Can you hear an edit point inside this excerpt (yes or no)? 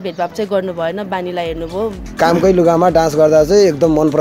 yes